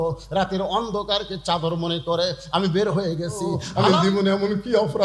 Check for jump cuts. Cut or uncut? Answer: cut